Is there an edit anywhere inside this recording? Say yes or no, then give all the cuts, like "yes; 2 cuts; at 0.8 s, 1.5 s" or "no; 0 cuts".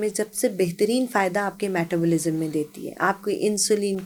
no; 0 cuts